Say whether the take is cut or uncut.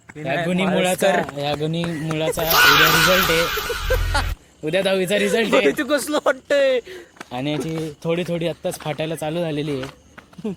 uncut